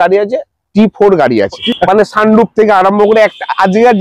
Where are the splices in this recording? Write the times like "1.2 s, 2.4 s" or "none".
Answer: 1.6 s